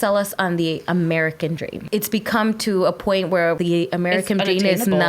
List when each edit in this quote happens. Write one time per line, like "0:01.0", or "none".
0:01.7
0:03.6